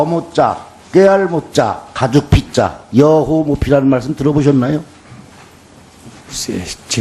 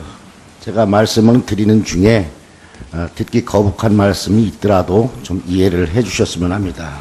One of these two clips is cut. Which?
second; 1 cut; at 1.5 s

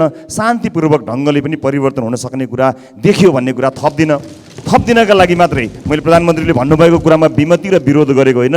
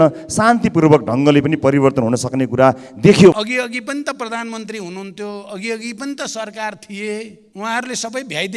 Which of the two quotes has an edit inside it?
second; 2 cuts; at 3.3 s, 7.4 s

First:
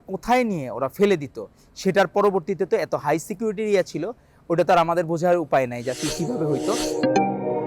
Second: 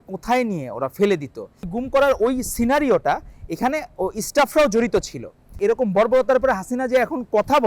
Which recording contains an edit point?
second; 2 cuts; at 1.7 s, 5.6 s

